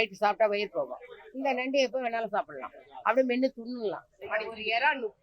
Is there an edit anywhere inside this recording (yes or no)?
yes